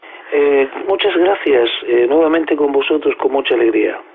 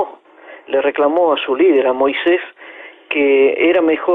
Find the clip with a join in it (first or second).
second